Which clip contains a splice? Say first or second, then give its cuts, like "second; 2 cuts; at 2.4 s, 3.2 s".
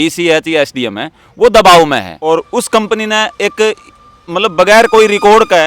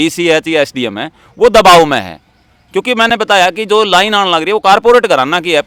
first; 1 cut; at 2.1 s